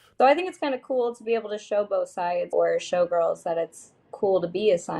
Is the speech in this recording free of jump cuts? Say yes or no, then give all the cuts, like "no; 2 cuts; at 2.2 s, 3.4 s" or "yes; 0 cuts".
no; 1 cut; at 2.5 s